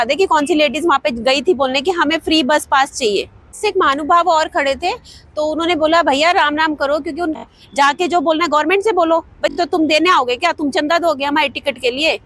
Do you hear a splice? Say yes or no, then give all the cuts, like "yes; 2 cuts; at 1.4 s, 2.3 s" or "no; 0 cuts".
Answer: yes; 3 cuts; at 3.6 s, 7.4 s, 9.5 s